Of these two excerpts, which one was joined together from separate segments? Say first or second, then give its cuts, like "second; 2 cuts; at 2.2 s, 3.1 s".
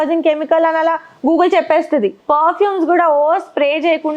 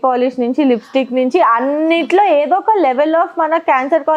first; 1 cut; at 2.2 s